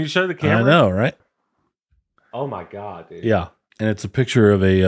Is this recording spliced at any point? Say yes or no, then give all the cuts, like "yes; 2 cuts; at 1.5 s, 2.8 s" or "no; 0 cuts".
yes; 2 cuts; at 1.3 s, 3.6 s